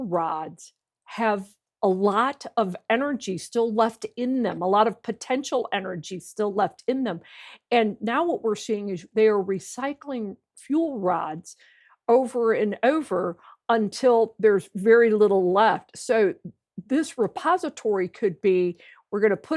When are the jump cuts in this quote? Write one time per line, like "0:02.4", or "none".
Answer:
none

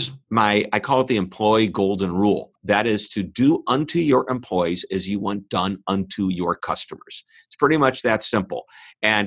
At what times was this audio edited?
0:02.5

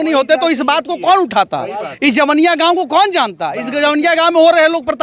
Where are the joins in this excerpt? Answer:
none

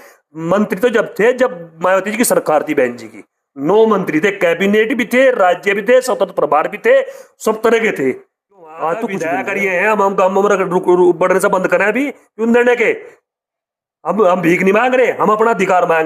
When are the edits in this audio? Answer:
0:09.4

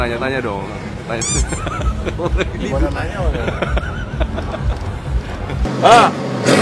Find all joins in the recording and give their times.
0:05.7

